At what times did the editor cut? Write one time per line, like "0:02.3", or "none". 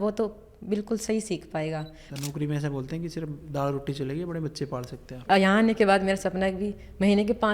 0:02.1
0:05.2